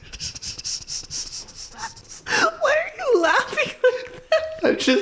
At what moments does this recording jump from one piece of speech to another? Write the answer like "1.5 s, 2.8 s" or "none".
2.0 s